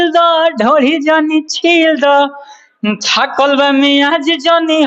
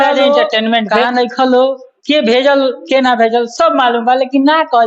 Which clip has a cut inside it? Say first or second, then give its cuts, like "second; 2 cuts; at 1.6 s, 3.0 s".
second; 1 cut; at 1.0 s